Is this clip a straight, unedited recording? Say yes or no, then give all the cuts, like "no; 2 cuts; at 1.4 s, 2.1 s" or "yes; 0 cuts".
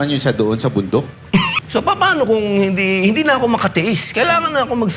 no; 1 cut; at 1.5 s